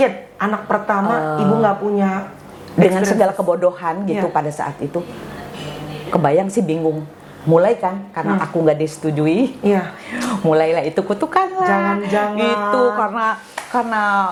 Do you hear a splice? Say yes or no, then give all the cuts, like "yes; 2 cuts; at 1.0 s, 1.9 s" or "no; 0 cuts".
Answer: no; 0 cuts